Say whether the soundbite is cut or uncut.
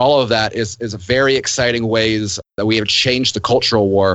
cut